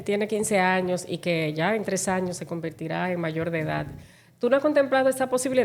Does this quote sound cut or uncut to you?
uncut